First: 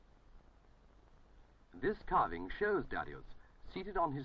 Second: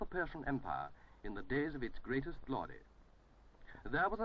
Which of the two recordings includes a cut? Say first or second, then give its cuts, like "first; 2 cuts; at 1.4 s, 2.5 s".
first; 1 cut; at 2.0 s